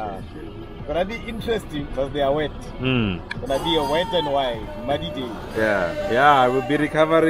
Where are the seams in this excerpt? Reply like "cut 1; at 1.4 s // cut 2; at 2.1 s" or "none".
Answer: cut 1; at 6.0 s